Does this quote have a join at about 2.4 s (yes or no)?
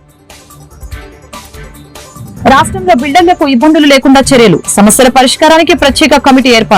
yes